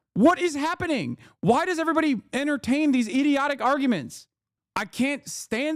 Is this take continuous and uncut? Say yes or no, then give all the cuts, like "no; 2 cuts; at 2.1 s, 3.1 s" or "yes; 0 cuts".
yes; 0 cuts